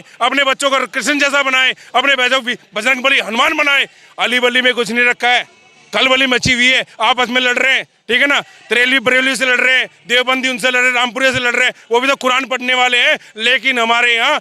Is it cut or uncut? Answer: uncut